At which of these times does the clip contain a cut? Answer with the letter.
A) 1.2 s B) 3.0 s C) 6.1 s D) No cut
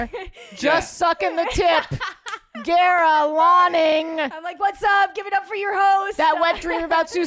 C